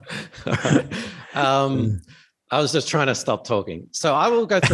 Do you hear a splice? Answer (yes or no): no